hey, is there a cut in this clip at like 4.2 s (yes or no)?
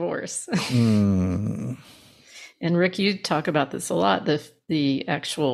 no